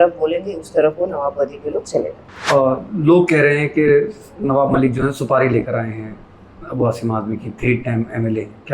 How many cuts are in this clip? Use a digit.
1